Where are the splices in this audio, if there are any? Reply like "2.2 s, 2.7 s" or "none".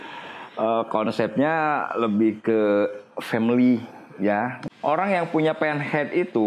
4.6 s